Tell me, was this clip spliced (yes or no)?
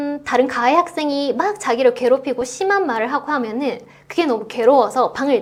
no